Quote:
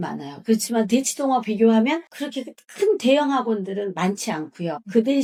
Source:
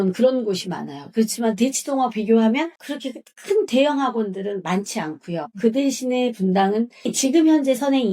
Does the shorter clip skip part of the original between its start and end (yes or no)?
no